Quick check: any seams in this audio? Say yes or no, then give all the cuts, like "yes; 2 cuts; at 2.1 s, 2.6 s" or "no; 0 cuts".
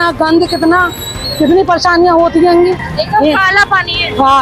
no; 0 cuts